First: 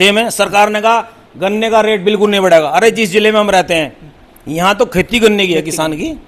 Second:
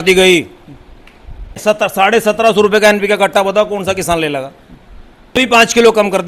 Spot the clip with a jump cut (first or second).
second